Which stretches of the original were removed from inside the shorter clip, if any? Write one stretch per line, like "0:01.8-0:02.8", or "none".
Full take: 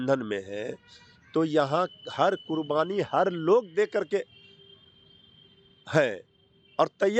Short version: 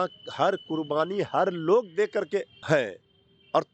0:04.3-0:05.8